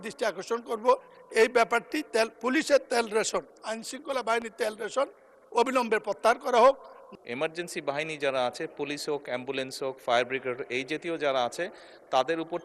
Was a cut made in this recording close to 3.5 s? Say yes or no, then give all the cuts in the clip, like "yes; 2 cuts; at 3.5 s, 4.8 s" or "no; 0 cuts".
no; 1 cut; at 6.9 s